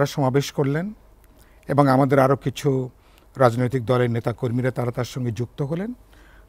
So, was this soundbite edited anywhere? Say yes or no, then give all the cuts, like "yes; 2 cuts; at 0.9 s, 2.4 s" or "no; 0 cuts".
no; 0 cuts